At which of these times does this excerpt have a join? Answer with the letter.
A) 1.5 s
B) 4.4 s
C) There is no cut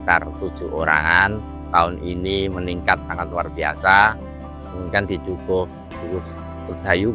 A